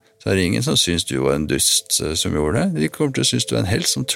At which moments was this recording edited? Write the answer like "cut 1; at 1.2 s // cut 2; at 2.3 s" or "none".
none

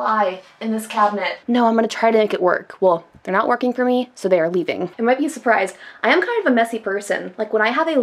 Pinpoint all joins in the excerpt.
cut 1; at 1.3 s // cut 2; at 4.9 s

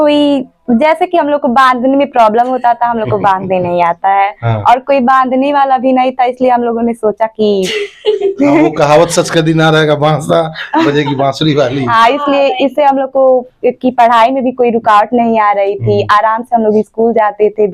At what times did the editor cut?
none

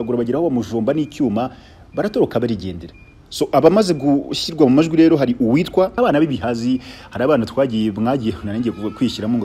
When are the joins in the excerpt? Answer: cut 1; at 6.0 s

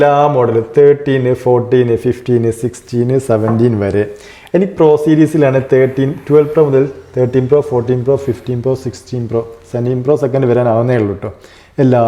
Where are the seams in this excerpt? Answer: none

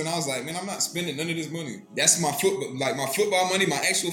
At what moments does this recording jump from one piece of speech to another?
cut 1; at 1.8 s

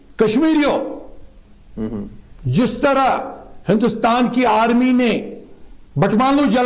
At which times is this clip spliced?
cut 1; at 2.8 s

